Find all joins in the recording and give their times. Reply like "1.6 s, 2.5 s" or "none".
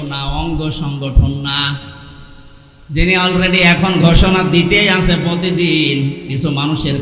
none